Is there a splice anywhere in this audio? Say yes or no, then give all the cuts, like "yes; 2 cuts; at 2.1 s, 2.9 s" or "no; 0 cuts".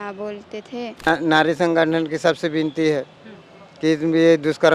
yes; 1 cut; at 1.1 s